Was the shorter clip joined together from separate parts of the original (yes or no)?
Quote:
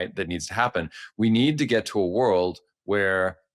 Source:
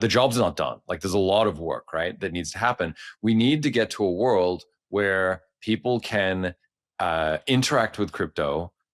no